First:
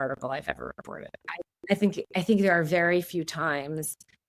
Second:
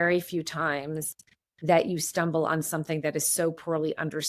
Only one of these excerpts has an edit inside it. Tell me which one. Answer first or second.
first